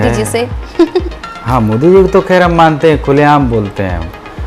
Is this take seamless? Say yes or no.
yes